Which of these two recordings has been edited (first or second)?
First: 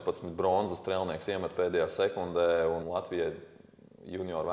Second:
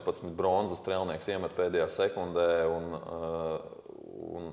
first